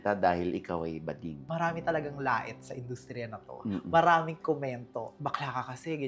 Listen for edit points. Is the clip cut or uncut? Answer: cut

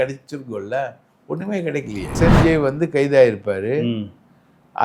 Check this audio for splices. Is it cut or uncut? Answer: cut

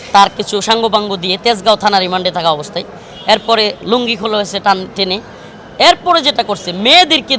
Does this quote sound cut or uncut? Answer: uncut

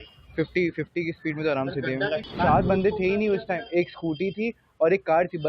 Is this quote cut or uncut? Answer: cut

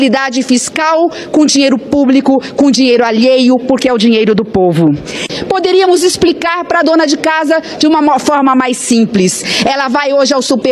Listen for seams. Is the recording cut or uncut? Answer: cut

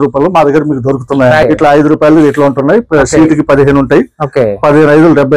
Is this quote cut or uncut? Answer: cut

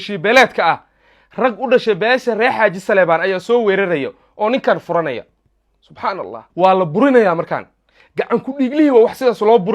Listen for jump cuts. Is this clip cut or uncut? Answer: cut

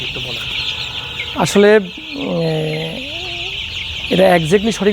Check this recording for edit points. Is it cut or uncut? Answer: uncut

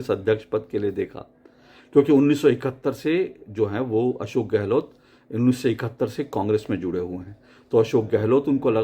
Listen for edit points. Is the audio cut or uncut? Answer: uncut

